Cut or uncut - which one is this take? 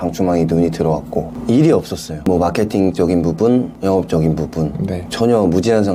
cut